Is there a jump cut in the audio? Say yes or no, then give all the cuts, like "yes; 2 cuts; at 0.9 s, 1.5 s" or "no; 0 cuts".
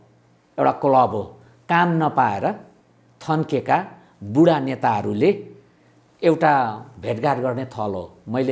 no; 0 cuts